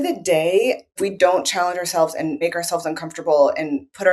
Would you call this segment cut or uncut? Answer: cut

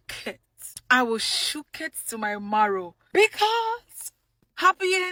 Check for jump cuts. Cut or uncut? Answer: uncut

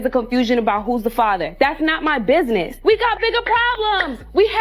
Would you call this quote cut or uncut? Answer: cut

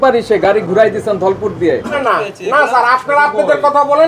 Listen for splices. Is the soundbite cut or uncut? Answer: cut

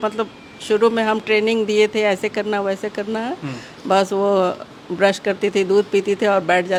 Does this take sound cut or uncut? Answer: uncut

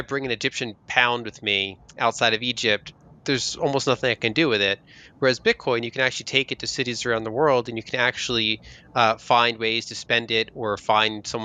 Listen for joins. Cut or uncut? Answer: uncut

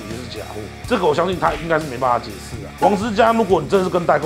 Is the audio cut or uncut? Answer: cut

